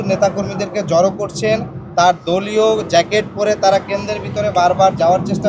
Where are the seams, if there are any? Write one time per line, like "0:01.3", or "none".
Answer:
none